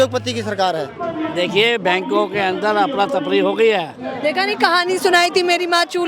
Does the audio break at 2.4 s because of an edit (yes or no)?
no